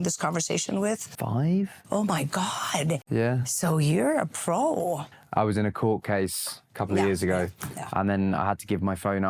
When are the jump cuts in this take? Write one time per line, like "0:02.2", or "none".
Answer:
0:05.0